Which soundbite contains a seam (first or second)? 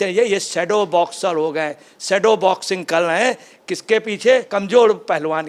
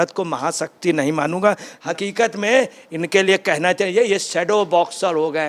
second